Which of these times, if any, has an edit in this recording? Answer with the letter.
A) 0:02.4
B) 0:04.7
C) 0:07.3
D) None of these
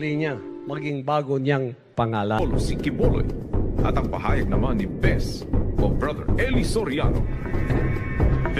A